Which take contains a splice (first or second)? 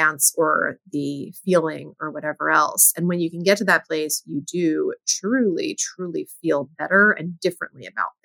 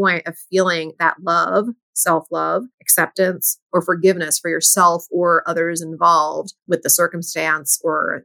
second